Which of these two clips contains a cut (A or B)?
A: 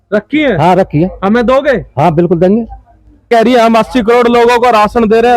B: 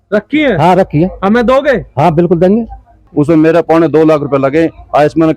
B